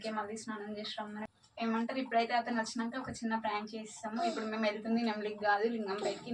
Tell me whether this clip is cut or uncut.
cut